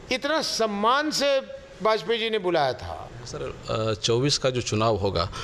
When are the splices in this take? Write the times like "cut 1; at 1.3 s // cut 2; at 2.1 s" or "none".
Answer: cut 1; at 3.5 s